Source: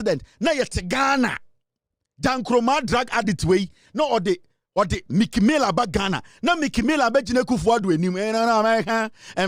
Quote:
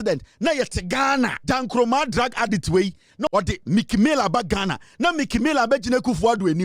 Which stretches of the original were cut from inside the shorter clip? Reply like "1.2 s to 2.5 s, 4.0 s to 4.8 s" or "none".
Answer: 1.4 s to 2.1 s, 4.0 s to 4.7 s